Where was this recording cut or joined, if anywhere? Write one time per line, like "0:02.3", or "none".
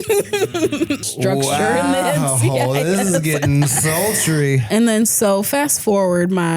0:01.0
0:04.6